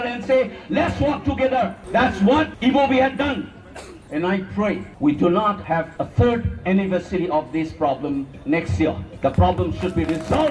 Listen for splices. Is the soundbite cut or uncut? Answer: cut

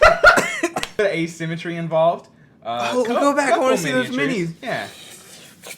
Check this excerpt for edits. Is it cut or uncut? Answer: cut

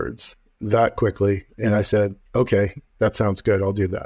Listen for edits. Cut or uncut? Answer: uncut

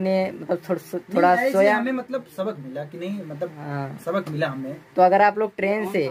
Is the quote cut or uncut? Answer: uncut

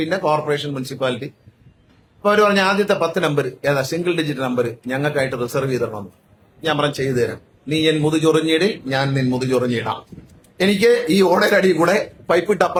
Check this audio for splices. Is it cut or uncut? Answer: uncut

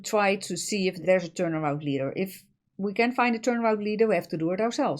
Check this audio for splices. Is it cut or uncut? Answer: cut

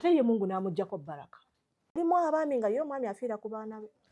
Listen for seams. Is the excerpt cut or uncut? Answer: cut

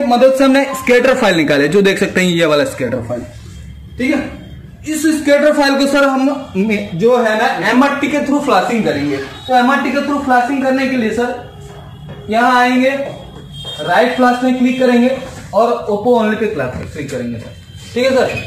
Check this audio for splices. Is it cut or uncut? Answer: uncut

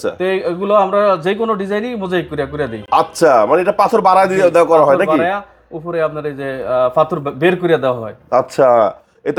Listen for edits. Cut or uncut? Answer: uncut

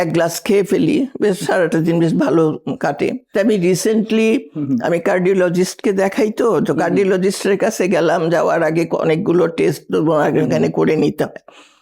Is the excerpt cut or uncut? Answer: cut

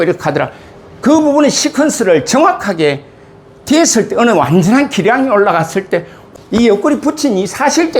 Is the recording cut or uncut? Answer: cut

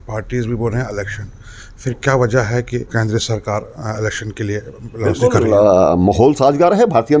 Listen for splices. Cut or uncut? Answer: uncut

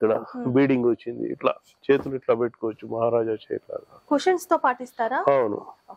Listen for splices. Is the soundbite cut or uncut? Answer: uncut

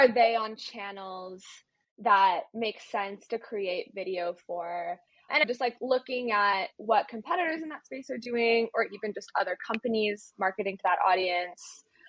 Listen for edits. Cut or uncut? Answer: uncut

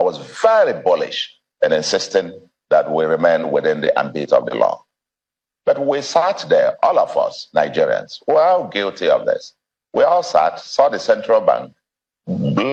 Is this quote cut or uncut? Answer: uncut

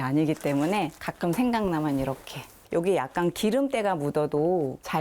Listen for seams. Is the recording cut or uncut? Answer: cut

